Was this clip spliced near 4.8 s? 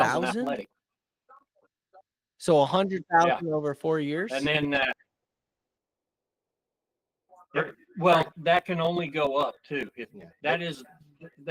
no; 0 cuts

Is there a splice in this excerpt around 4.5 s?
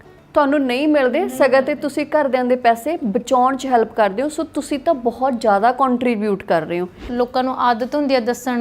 no; 1 cut; at 7.1 s

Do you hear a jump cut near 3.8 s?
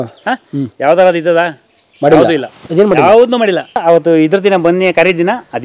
yes; 1 cut; at 3.8 s

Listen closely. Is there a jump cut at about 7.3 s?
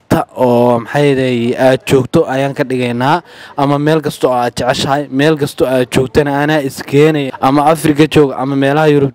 yes; 1 cut; at 7.3 s

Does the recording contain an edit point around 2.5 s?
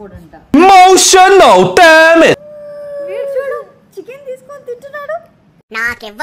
yes; 1 cut; at 2.5 s

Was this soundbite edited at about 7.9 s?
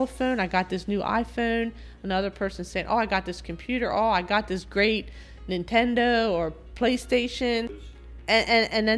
yes; 1 cut; at 7.9 s

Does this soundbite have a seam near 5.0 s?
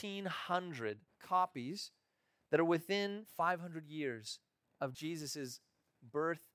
yes; 3 cuts; at 1.1 s, 3.2 s, 5.0 s

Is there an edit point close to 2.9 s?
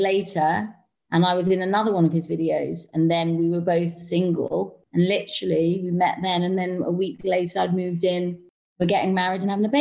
no; 1 cut; at 4.8 s

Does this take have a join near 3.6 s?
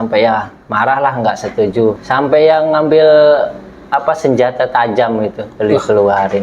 no; 1 cut; at 2.0 s

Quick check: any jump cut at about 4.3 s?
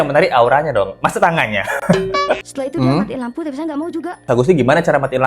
yes; 2 cuts; at 2.4 s, 4.3 s

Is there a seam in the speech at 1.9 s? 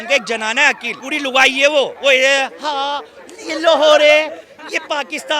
yes; 2 cuts; at 0.9 s, 1.9 s

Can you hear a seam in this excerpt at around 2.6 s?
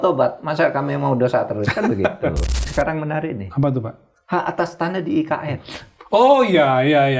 yes; 1 cut; at 2.6 s

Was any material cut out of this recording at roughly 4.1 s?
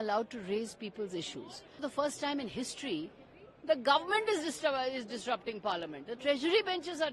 no; 1 cut; at 1.8 s

